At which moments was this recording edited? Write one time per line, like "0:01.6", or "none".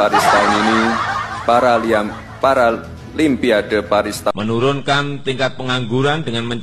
0:04.3